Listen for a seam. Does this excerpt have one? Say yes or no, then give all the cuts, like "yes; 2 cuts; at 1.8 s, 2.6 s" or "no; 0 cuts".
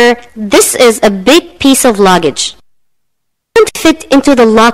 yes; 1 cut; at 3.7 s